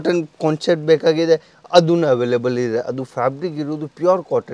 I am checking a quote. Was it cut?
no; 0 cuts

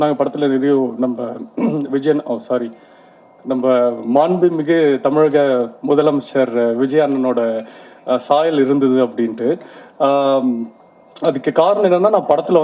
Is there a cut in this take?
no; 0 cuts

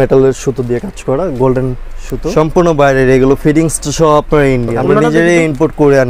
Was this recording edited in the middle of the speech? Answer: yes; 2 cuts; at 2.2 s, 4.8 s

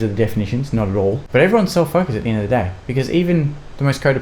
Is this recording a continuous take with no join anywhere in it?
no; 1 cut; at 1.2 s

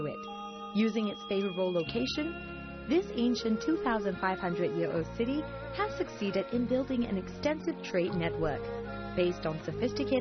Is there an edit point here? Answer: yes; 1 cut; at 1.2 s

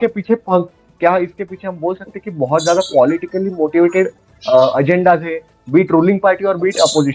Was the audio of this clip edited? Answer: no; 0 cuts

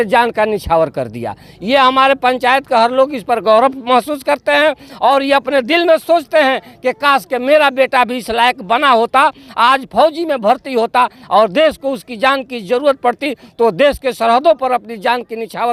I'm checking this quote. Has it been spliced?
no; 0 cuts

